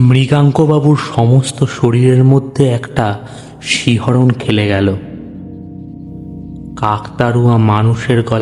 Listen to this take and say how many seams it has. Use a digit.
0